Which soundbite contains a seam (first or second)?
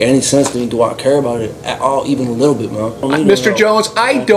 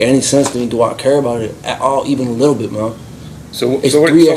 first